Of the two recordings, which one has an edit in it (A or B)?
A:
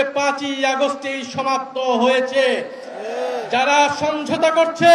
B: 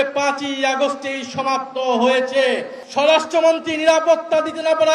B